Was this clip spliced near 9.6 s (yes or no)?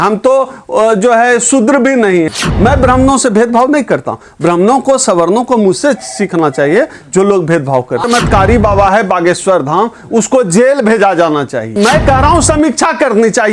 no